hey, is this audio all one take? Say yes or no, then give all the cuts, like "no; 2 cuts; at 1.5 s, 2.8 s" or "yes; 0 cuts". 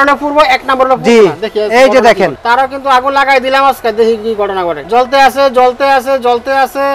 no; 2 cuts; at 2.4 s, 4.8 s